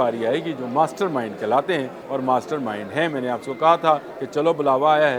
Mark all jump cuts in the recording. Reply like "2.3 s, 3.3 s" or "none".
2.0 s, 4.2 s